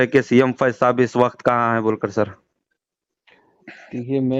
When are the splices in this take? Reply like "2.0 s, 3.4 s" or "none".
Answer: none